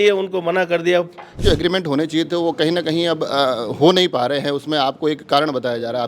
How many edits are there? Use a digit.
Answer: 1